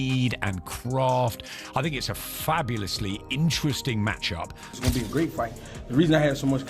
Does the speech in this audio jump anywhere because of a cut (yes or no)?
yes